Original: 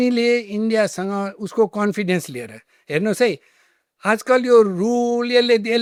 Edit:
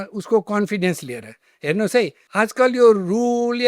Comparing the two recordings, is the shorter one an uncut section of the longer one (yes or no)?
no